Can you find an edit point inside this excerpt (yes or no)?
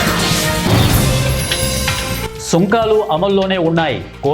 yes